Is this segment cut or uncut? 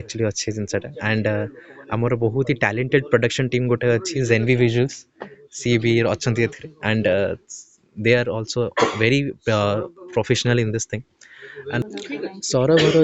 cut